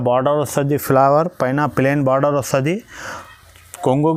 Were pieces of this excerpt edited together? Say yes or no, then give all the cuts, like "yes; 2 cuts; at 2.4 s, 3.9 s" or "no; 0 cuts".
no; 0 cuts